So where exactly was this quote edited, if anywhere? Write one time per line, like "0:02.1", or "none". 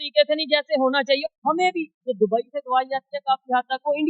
0:01.2

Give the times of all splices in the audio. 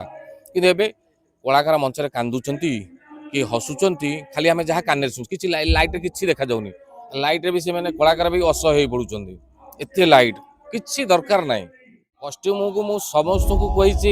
0:12.4

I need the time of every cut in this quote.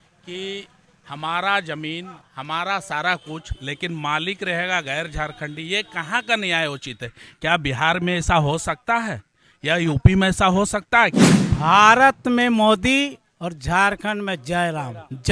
0:11.4

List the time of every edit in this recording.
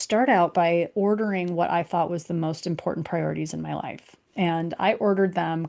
none

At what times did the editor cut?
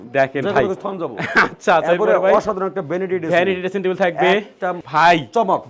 0:04.8

